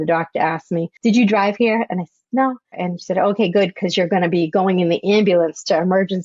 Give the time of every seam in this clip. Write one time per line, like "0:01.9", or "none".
0:00.9
0:02.8